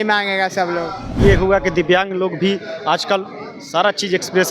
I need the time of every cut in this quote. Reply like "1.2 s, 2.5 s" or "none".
1.2 s